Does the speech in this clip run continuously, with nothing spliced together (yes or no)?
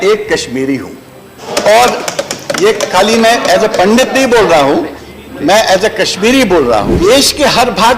no